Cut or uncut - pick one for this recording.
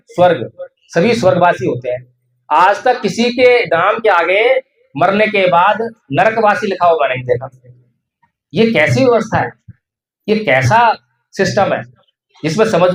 uncut